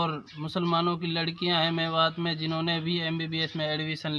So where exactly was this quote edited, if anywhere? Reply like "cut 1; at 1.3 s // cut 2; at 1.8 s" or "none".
none